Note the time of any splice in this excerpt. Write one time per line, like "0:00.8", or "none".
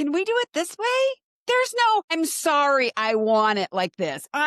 0:01.3
0:02.1